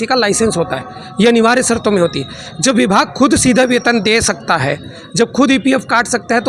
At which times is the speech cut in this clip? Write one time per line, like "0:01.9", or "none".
none